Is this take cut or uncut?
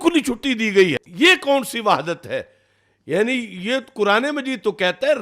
cut